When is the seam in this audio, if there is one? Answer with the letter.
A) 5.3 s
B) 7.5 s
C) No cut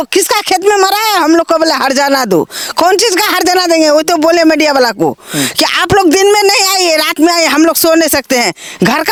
C